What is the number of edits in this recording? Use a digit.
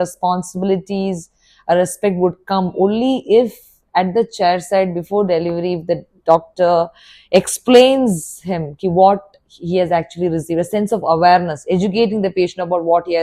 0